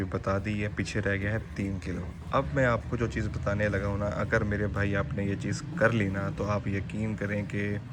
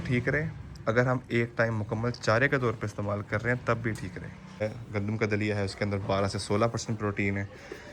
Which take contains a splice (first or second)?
second